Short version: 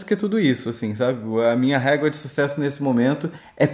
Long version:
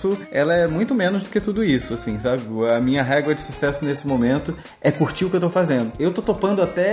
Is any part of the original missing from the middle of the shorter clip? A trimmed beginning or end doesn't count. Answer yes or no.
no